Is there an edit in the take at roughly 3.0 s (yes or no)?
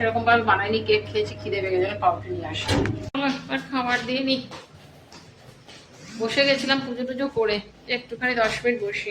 yes